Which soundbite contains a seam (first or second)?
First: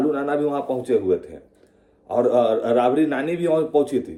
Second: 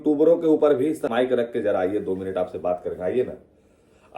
second